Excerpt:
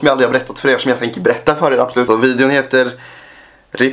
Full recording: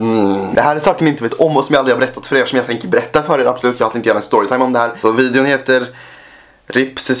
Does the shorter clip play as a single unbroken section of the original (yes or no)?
no